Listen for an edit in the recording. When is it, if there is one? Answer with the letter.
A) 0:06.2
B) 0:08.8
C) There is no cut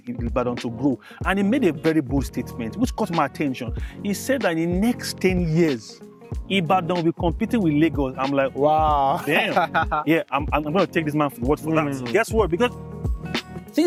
C